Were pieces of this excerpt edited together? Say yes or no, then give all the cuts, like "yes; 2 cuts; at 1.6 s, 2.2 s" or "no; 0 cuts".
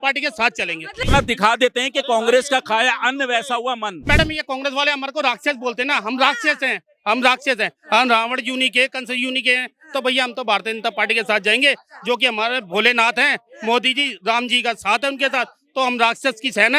yes; 2 cuts; at 1.0 s, 4.0 s